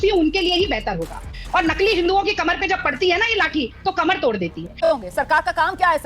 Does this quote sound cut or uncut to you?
cut